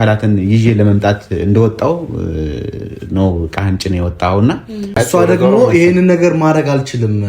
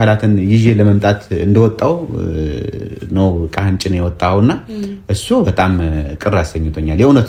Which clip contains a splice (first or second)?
first